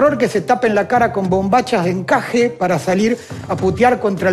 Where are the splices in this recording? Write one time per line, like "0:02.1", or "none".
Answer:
none